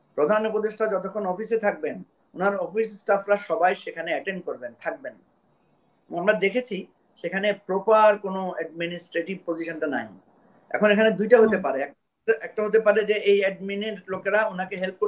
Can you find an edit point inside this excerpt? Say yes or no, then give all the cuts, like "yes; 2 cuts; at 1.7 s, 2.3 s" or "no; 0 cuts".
no; 0 cuts